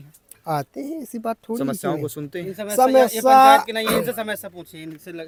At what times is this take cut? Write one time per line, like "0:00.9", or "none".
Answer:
none